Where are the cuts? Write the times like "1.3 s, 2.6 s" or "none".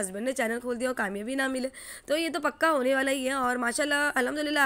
none